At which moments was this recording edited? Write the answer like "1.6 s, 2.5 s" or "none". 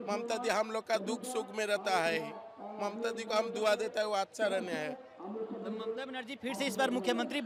none

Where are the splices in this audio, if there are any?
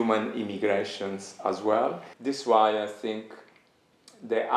2.1 s

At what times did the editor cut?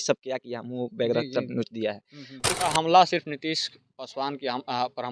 2.6 s

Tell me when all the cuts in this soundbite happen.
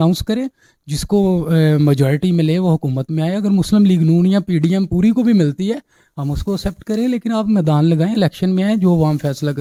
none

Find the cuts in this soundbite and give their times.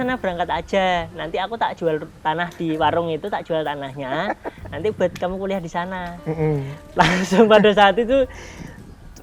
none

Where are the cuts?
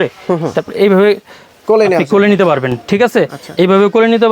none

